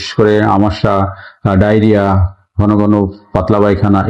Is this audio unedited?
yes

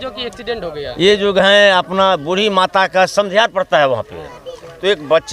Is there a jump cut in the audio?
no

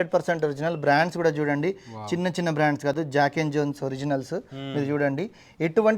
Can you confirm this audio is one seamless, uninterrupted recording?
yes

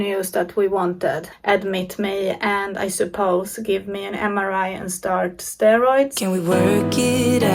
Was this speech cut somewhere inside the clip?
yes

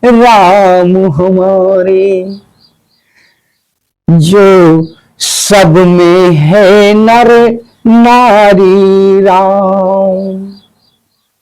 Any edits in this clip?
no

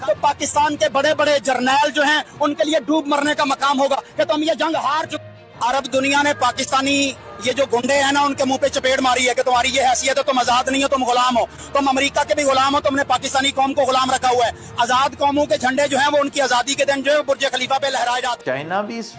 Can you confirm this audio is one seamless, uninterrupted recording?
no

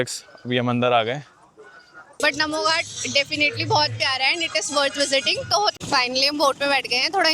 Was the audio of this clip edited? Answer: yes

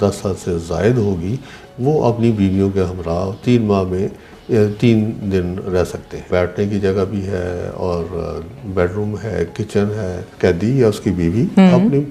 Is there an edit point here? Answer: yes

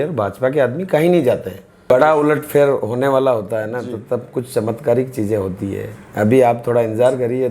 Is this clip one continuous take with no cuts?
no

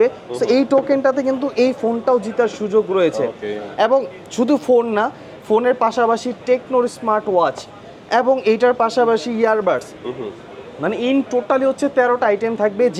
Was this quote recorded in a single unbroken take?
yes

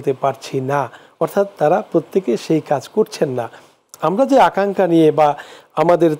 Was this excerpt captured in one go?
yes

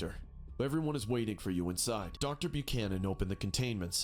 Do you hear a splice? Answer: yes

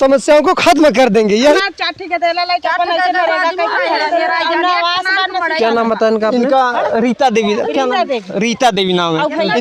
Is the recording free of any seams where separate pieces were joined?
no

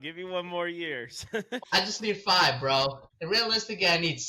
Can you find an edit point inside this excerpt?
yes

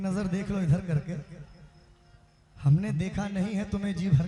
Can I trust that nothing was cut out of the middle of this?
yes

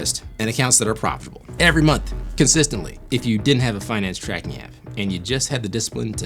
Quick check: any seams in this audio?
yes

